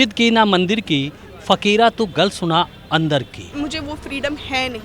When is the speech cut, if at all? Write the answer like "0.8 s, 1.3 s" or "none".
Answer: 3.5 s